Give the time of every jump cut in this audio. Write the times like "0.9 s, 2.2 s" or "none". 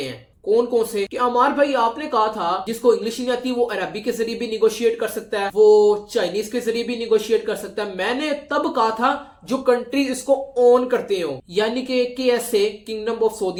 none